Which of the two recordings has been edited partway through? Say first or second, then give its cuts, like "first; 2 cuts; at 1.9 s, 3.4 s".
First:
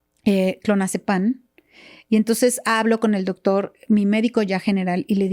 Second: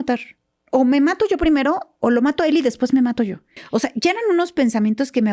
second; 1 cut; at 3.5 s